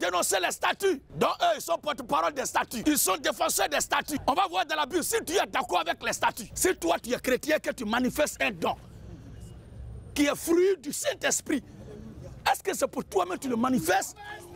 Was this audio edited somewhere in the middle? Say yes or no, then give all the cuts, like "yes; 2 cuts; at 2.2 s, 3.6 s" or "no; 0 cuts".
yes; 4 cuts; at 1.1 s, 2.7 s, 4.1 s, 6.5 s